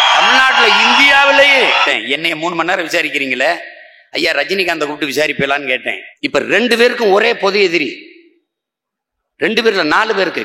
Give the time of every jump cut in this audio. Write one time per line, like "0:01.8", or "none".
0:01.8
0:06.0